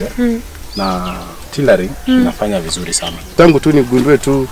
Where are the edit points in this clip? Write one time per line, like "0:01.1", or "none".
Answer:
0:03.3